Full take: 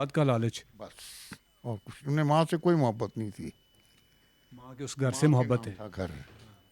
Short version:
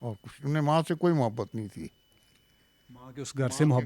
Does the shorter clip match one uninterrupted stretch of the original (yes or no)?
yes